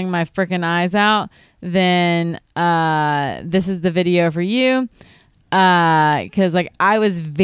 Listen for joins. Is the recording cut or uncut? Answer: uncut